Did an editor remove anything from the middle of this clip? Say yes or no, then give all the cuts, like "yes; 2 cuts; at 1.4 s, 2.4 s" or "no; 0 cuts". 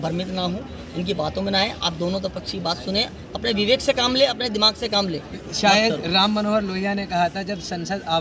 yes; 1 cut; at 5.4 s